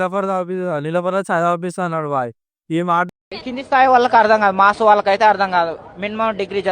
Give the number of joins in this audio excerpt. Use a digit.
2